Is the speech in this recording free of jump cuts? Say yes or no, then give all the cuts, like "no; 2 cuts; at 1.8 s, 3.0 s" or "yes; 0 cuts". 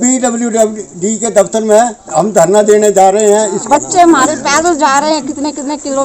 no; 1 cut; at 3.6 s